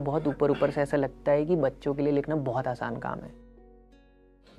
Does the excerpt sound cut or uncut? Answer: uncut